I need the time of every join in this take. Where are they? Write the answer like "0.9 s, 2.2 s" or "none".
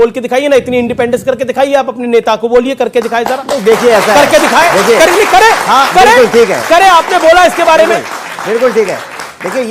none

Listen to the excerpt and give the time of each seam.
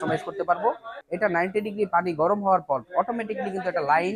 0.9 s

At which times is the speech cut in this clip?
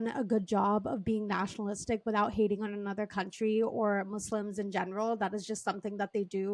none

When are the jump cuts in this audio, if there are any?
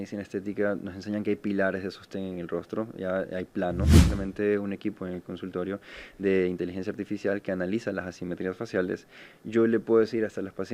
4.1 s

